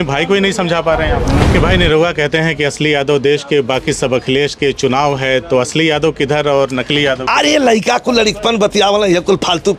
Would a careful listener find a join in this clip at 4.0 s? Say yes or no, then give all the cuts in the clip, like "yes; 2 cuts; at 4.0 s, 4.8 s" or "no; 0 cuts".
no; 1 cut; at 1.4 s